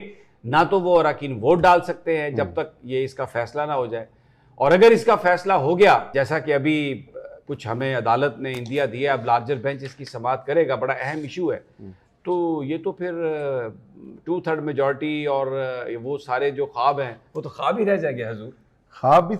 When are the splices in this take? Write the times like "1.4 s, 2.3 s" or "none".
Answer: 6.1 s